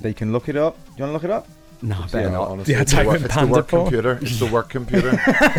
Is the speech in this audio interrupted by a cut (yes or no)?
no